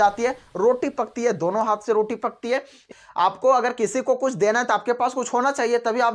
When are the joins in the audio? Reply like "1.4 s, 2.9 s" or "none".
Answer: 2.9 s